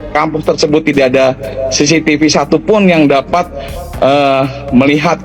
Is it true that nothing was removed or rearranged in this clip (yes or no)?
yes